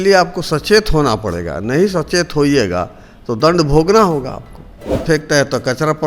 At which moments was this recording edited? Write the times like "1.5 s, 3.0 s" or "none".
5.0 s